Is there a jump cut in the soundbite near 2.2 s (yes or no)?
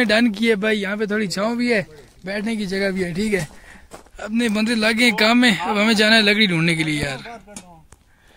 no